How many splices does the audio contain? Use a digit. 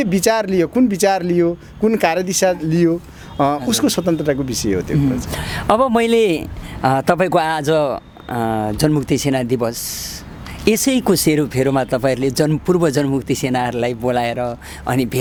0